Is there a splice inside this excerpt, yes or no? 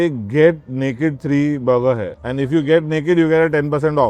yes